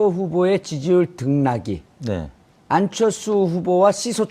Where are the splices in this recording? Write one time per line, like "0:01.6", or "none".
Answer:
0:03.0

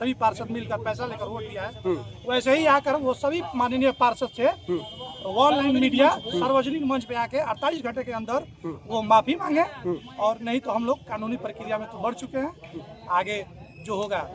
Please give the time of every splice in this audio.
none

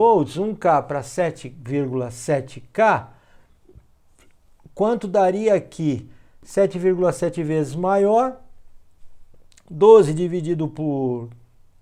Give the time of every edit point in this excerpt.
none

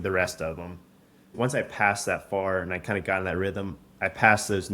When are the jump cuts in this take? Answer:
0:01.3

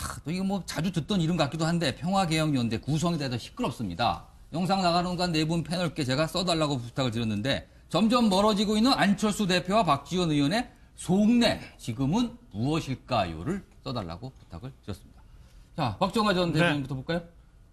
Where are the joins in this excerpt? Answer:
0:14.0

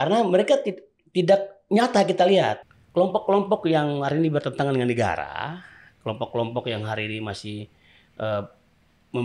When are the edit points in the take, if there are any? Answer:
0:02.6

